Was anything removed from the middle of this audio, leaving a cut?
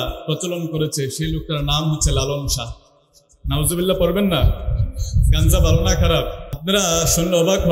yes; 1 cut; at 6.5 s

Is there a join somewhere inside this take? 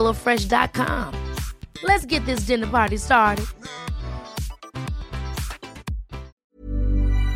yes; 1 cut; at 6.4 s

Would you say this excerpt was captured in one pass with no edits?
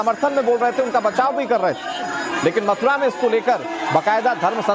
yes; 0 cuts

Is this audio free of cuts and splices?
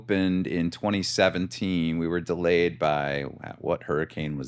yes; 0 cuts

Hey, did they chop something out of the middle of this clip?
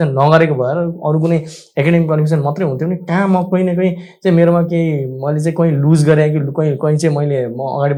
no; 0 cuts

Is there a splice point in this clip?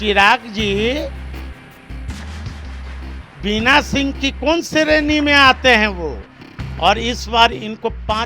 yes; 1 cut; at 6.4 s

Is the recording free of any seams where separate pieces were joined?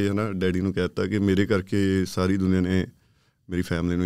yes; 0 cuts

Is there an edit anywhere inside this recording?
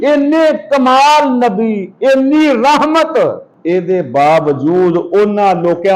yes; 1 cut; at 3.5 s

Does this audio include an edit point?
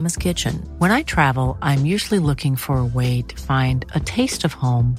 no; 0 cuts

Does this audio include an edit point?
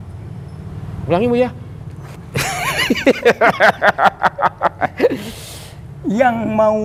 no; 0 cuts

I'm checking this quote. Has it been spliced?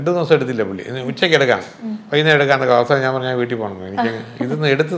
no; 0 cuts

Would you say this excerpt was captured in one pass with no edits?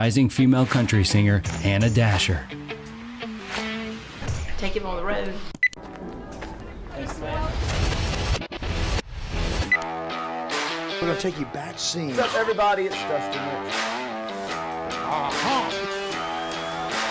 yes; 0 cuts

